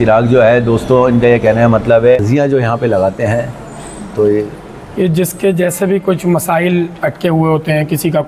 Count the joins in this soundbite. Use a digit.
1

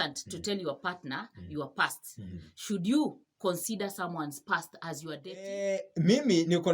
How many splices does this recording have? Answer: 1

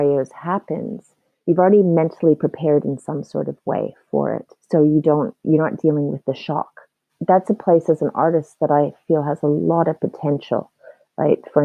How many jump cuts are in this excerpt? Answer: 1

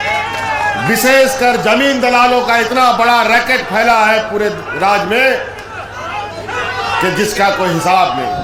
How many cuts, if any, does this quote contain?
0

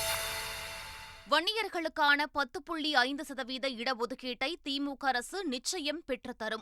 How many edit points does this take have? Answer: 1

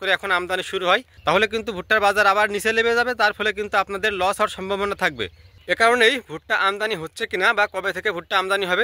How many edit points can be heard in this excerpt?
0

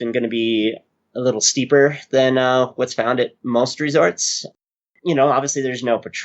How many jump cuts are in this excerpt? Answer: 1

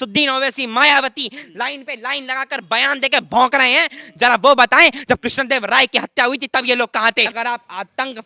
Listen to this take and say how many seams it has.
1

